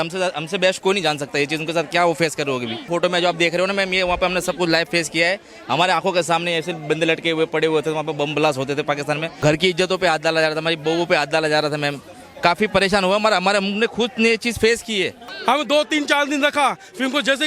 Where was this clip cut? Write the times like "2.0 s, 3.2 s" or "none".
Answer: 2.9 s, 9.4 s, 15.2 s